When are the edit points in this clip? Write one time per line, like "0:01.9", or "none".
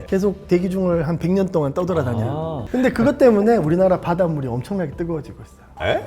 0:02.6

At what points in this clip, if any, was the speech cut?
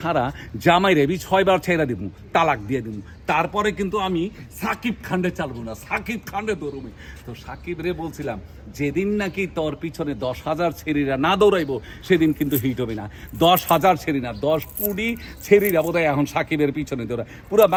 none

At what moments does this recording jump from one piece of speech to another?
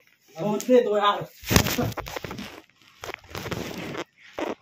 none

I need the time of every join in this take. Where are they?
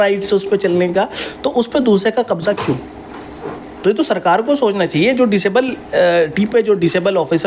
none

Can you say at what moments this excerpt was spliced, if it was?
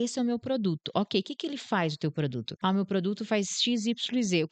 0:02.5

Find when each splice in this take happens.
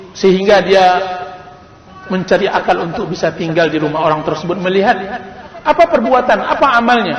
none

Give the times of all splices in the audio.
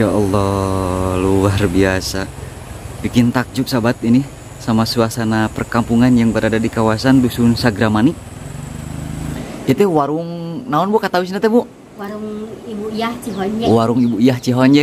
0:09.4

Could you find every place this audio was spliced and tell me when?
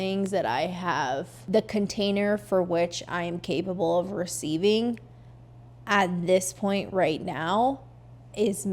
0:01.3

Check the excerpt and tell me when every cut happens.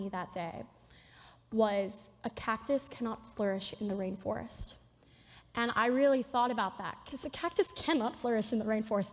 none

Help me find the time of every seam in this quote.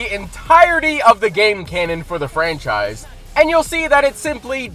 none

